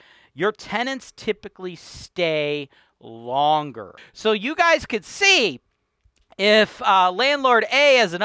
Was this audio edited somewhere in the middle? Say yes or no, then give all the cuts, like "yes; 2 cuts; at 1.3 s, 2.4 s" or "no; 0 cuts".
yes; 1 cut; at 4.0 s